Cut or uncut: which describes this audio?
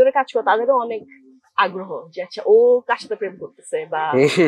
uncut